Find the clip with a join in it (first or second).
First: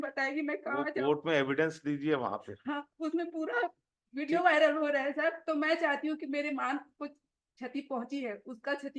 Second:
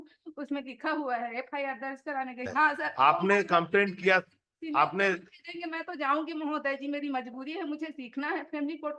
second